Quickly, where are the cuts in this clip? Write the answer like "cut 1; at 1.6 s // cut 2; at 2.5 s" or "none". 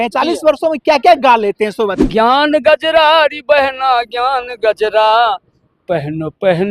cut 1; at 2.0 s